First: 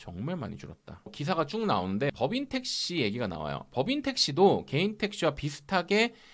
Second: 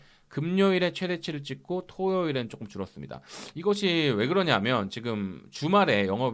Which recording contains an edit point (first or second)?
first